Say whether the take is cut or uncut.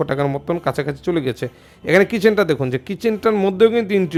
uncut